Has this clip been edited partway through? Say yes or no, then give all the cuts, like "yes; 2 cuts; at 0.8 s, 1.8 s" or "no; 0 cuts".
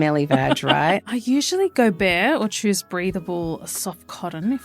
yes; 1 cut; at 0.9 s